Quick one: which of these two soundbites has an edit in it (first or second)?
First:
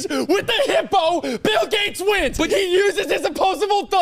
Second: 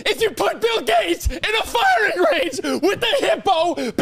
first